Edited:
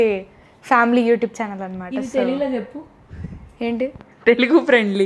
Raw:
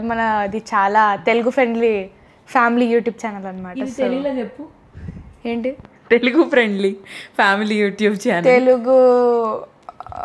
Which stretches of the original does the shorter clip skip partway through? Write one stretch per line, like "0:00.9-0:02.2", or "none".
none

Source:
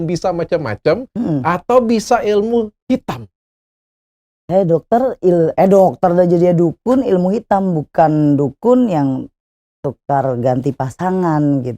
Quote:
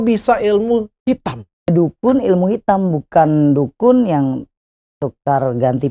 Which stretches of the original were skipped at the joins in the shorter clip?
0:03.5-0:06.5

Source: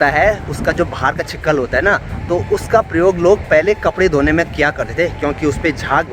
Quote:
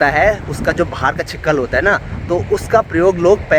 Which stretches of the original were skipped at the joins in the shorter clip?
none

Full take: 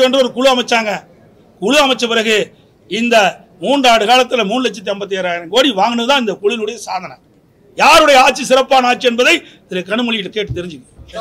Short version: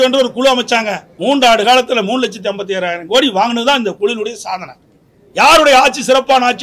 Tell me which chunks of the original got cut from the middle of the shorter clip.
0:01.1-0:03.5

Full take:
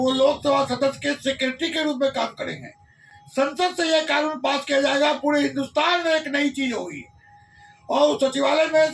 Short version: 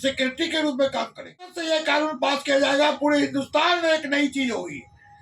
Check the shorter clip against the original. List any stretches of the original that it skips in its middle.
0:02.8-0:03.8

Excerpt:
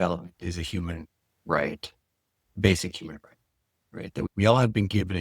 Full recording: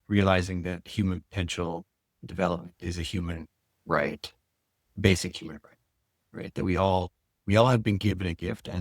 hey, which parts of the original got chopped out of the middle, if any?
0:06.7-0:07.4

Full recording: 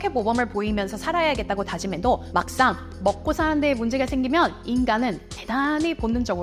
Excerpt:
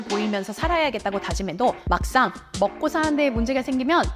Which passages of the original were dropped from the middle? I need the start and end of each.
none

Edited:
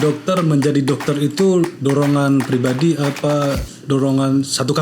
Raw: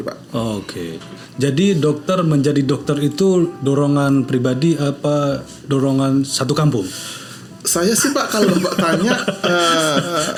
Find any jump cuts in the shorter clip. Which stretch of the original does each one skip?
none

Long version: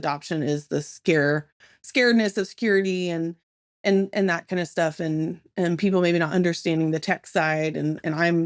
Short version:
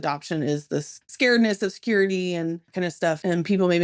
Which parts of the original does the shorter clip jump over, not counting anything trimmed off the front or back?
0:00.9-0:01.7
0:03.8-0:05.3

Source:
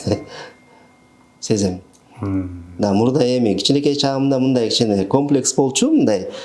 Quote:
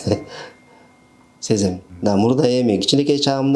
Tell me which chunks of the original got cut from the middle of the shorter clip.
0:01.9-0:02.6

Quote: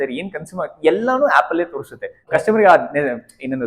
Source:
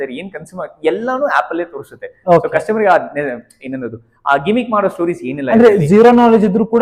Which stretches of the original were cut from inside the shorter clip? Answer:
0:02.2-0:02.5

